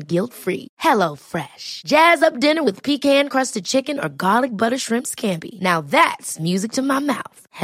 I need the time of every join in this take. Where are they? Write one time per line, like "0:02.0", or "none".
none